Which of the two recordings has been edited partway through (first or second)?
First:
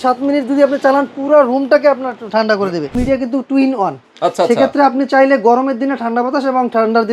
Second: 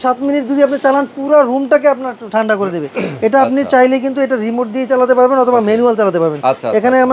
first